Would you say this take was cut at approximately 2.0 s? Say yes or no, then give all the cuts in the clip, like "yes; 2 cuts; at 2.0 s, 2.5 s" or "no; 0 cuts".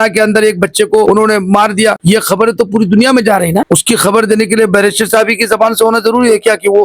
yes; 3 cuts; at 1.1 s, 2.0 s, 3.7 s